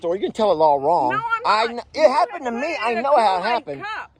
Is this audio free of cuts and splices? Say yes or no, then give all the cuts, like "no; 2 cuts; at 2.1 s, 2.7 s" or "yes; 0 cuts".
yes; 0 cuts